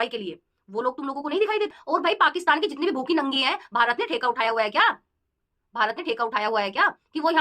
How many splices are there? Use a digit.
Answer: 1